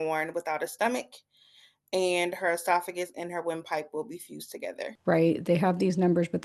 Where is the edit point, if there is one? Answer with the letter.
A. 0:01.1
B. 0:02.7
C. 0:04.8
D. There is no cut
C